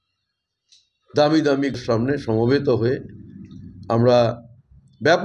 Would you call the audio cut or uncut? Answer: cut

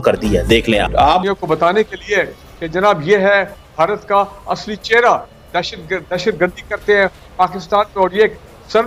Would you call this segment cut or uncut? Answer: uncut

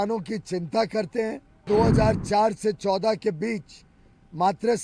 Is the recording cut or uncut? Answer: cut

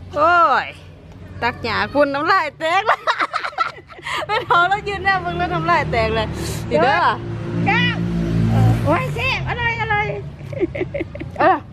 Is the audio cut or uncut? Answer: uncut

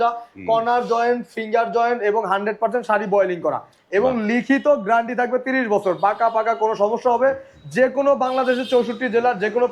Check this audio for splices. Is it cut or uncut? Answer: uncut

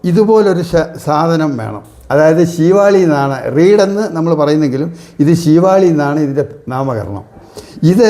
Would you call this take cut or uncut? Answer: uncut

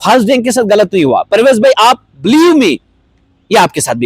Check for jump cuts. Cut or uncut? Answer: uncut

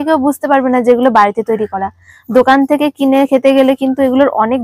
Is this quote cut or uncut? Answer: uncut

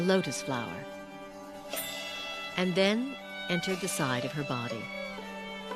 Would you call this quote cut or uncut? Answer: cut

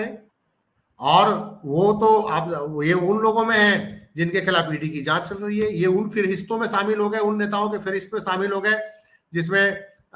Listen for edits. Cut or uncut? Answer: uncut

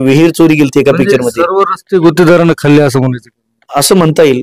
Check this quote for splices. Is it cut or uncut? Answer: uncut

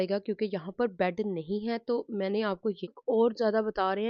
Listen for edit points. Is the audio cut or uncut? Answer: cut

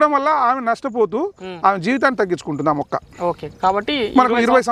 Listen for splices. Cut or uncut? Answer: uncut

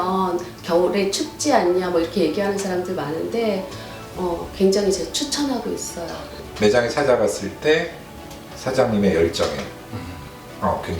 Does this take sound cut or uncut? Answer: cut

